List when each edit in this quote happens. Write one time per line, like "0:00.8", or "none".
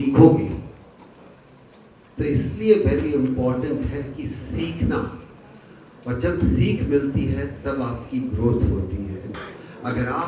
0:09.3